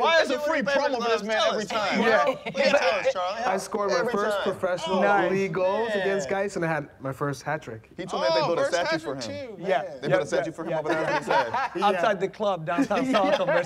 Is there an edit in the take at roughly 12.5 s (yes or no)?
no